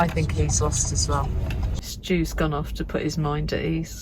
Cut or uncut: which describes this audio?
cut